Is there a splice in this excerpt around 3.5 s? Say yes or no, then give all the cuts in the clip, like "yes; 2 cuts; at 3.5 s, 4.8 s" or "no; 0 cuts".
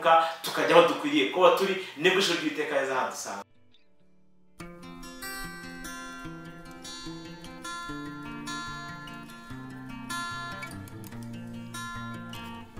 yes; 1 cut; at 3.5 s